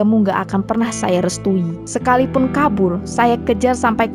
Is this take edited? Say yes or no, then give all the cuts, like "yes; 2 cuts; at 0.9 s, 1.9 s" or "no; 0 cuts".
no; 0 cuts